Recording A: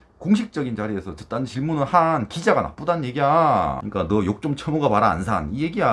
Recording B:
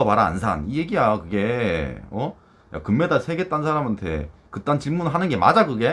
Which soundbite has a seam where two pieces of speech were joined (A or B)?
A